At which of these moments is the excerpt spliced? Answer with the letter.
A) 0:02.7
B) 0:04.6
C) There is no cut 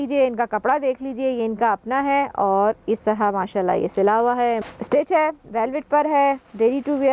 B